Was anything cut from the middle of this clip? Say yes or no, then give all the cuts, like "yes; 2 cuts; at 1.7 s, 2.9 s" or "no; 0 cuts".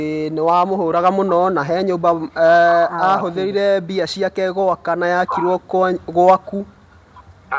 no; 0 cuts